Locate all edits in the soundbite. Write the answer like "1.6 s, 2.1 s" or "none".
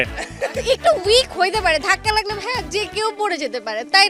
none